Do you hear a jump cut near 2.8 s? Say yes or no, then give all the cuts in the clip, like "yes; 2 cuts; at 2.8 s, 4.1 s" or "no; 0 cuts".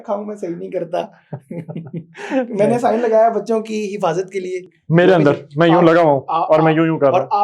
no; 1 cut; at 4.6 s